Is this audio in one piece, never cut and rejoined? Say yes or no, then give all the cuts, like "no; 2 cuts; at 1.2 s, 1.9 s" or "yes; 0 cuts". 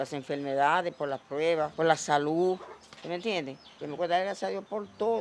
yes; 0 cuts